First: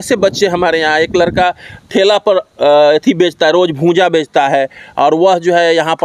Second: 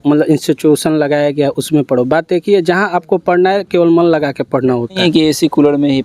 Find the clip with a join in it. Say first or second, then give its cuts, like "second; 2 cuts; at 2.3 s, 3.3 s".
second; 1 cut; at 5.0 s